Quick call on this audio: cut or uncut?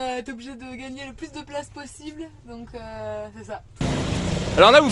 cut